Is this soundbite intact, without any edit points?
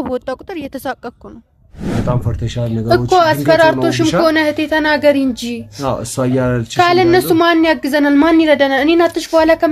no; 1 cut; at 2.0 s

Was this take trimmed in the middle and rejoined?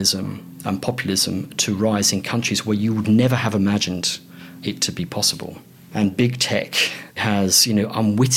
yes; 2 cuts; at 5.7 s, 7.2 s

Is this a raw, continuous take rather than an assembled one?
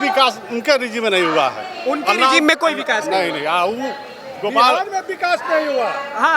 yes; 0 cuts

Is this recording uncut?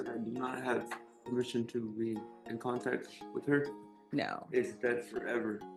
yes; 0 cuts

